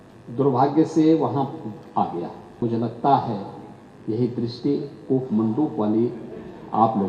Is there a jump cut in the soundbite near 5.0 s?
no; 1 cut; at 2.6 s

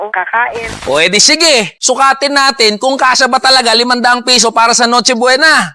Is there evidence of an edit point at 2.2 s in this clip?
yes; 1 cut; at 2.2 s

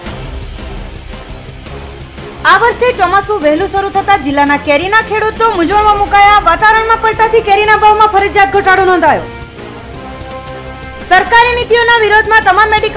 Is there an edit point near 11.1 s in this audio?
no; 1 cut; at 2.4 s

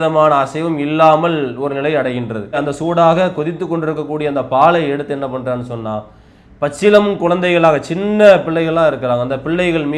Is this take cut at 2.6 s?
yes; 1 cut; at 2.6 s

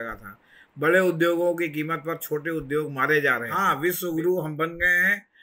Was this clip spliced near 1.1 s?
no; 1 cut; at 3.6 s

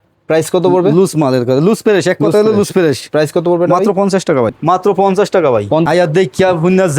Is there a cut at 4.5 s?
yes; 2 cuts; at 4.5 s, 5.9 s

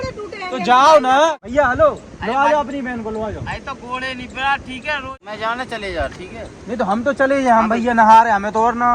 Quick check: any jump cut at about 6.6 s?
no; 2 cuts; at 1.4 s, 5.2 s

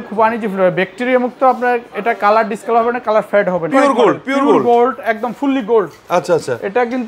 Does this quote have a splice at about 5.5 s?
no; 1 cut; at 3.7 s

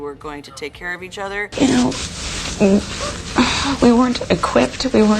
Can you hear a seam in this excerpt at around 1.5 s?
yes; 1 cut; at 1.5 s

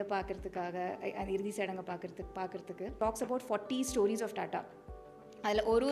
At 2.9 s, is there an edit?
yes; 1 cut; at 2.9 s

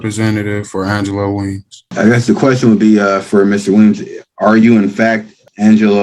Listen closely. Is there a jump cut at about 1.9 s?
yes; 1 cut; at 1.9 s

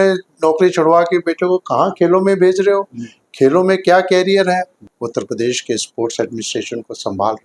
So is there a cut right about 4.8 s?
yes; 1 cut; at 4.8 s

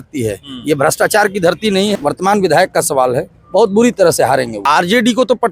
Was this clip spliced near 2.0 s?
yes; 2 cuts; at 2.0 s, 4.6 s

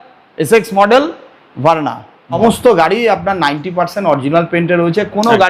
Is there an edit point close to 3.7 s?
no; 1 cut; at 2.4 s

